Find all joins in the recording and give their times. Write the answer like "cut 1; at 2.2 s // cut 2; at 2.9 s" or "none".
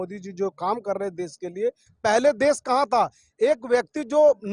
cut 1; at 1.9 s